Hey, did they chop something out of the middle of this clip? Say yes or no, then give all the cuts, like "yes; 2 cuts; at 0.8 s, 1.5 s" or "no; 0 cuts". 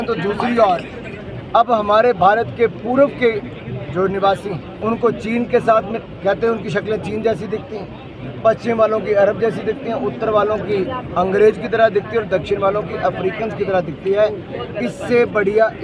yes; 1 cut; at 4.7 s